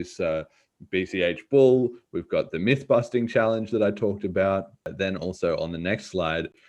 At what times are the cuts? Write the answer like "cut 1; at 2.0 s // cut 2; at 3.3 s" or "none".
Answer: cut 1; at 4.9 s